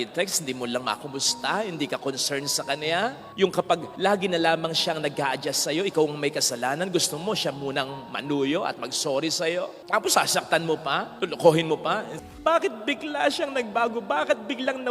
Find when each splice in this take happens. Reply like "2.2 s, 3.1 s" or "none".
12.2 s